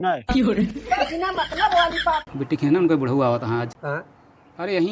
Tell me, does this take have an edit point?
yes; 2 cuts; at 2.3 s, 3.8 s

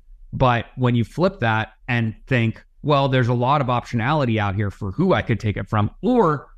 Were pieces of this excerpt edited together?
yes; 1 cut; at 2.2 s

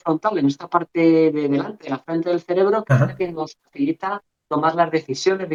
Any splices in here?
no; 0 cuts

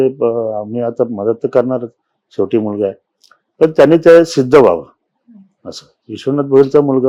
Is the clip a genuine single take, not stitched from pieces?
yes; 0 cuts

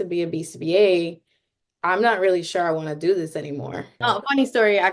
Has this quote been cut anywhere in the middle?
yes; 1 cut; at 3.8 s

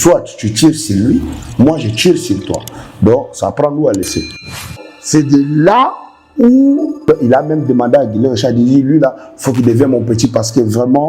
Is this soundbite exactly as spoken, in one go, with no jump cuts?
no; 2 cuts; at 4.6 s, 6.9 s

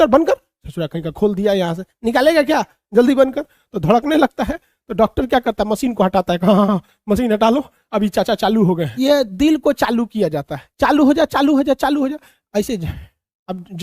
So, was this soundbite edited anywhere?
yes; 1 cut; at 8.9 s

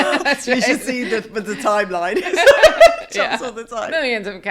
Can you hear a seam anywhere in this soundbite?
no; 0 cuts

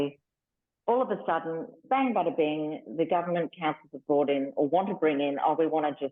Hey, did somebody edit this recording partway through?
yes; 1 cut; at 1.7 s

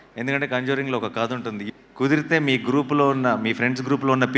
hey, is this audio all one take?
no; 1 cut; at 1.6 s

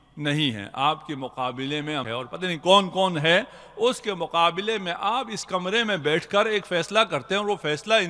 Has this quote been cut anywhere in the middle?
yes; 1 cut; at 2.0 s

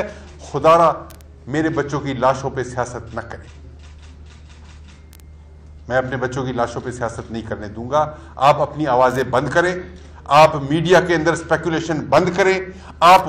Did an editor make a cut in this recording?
no; 0 cuts

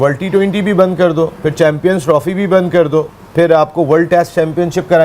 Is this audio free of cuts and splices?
yes; 0 cuts

